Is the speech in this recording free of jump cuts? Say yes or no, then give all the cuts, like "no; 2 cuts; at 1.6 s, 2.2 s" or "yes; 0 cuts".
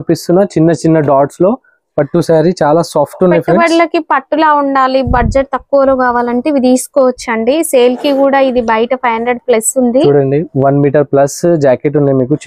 yes; 0 cuts